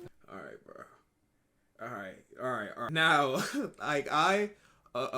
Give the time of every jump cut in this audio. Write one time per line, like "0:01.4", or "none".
0:02.8

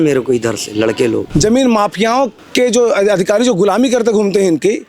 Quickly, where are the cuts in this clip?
0:01.3
0:02.4

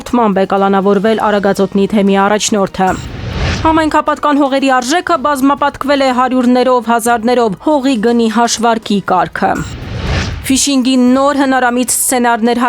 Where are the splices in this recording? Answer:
0:10.3

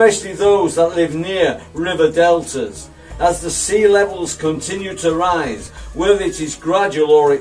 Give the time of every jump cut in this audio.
0:02.7

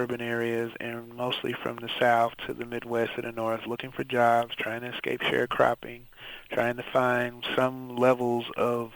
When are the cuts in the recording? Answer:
none

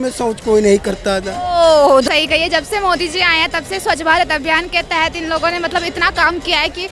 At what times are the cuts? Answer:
0:02.1

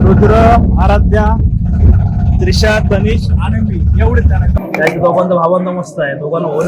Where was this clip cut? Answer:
0:04.5

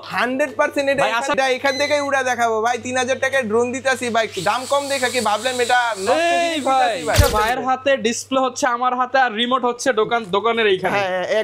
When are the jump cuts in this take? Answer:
0:01.3
0:07.2

